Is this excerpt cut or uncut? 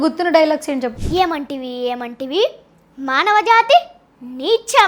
cut